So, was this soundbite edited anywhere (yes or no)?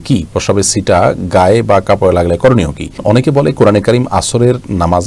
yes